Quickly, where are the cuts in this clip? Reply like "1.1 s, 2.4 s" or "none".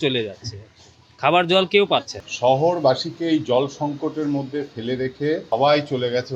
2.2 s, 5.4 s